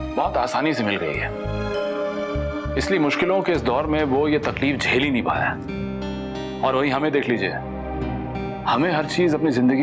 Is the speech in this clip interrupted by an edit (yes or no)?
no